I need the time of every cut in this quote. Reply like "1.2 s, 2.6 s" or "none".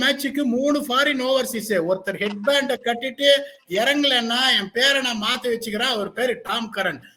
none